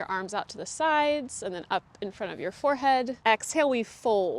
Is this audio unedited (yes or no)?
no